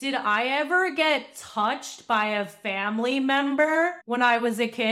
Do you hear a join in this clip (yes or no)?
yes